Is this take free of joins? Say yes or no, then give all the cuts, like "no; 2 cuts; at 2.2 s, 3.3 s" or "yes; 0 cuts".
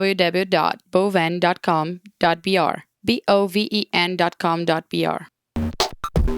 no; 2 cuts; at 2.9 s, 5.2 s